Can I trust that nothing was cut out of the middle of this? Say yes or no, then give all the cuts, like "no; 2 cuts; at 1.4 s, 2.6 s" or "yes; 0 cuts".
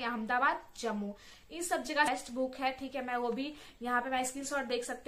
no; 1 cut; at 2.1 s